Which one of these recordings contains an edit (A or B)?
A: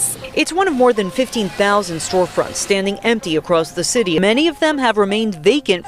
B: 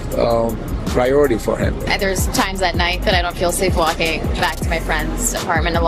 A